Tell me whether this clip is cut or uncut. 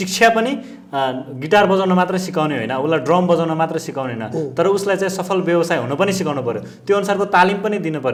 uncut